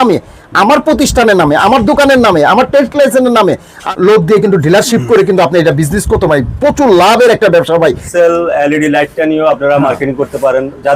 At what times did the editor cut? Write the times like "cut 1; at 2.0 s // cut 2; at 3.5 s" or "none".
cut 1; at 3.8 s // cut 2; at 8.1 s